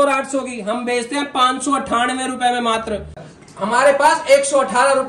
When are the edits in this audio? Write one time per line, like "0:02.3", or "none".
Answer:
0:03.2